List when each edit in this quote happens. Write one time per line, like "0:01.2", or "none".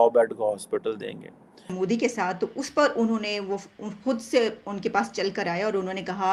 0:01.7